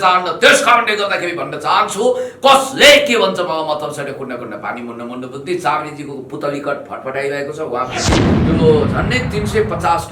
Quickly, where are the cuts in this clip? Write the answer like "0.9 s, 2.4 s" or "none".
8.4 s